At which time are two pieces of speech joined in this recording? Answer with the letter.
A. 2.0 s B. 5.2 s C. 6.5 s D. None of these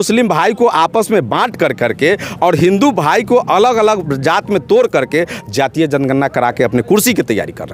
D